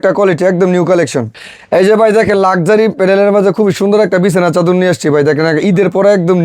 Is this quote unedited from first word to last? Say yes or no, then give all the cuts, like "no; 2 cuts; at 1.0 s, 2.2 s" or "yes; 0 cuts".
no; 1 cut; at 1.3 s